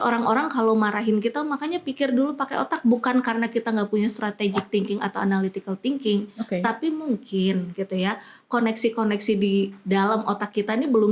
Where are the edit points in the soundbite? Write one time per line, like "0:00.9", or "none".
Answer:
none